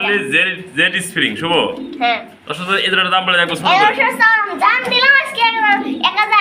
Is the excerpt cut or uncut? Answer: uncut